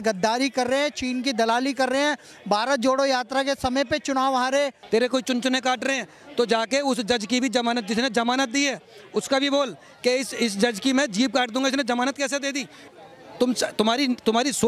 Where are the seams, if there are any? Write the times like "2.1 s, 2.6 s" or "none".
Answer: 4.8 s, 12.9 s

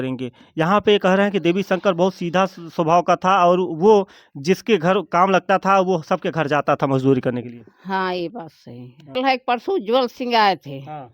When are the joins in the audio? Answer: 9.2 s

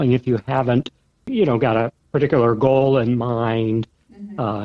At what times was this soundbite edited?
1.3 s

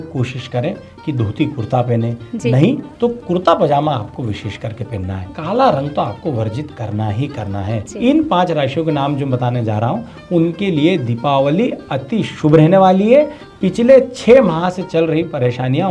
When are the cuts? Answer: 5.3 s, 7.9 s

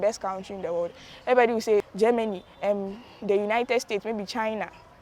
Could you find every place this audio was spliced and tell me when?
1.9 s

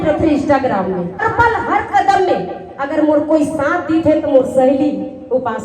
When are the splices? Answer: 1.2 s

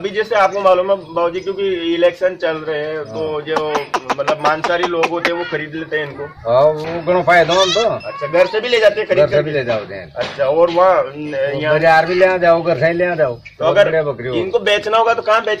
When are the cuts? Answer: none

